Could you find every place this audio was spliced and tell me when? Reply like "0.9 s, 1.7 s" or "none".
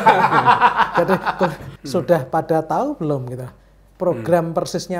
1.6 s